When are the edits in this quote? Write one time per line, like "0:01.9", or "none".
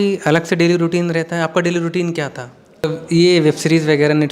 0:02.8